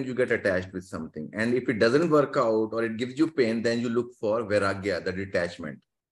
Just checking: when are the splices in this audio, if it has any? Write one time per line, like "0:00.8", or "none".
none